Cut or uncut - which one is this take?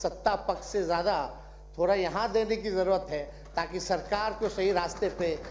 uncut